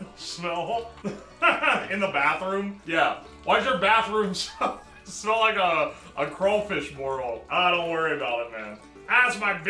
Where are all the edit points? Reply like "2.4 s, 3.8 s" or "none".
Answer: 2.8 s, 7.4 s

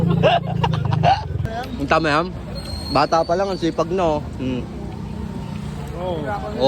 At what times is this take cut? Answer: 1.5 s

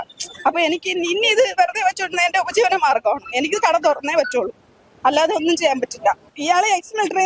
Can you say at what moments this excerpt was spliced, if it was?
6.3 s

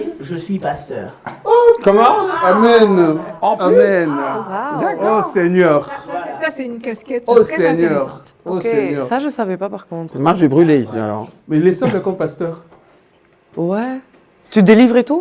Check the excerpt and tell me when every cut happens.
none

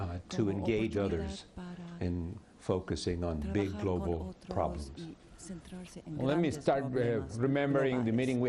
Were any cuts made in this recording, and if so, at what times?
4.4 s

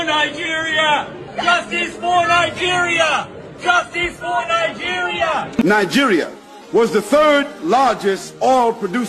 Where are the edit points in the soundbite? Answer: 5.6 s

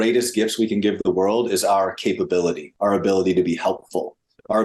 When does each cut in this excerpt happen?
none

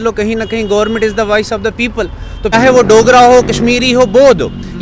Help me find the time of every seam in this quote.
2.5 s

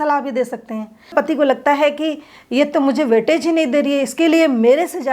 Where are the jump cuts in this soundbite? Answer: 1.1 s

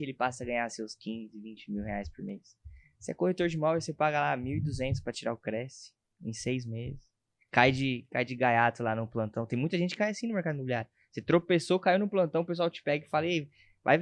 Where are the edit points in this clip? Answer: none

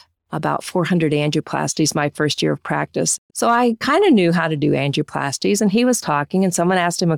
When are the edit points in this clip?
3.2 s

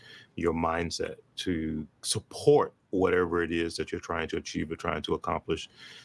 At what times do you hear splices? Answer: none

